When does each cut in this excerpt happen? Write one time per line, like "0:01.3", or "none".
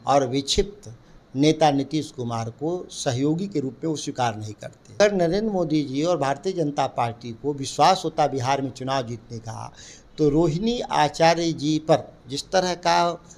0:05.0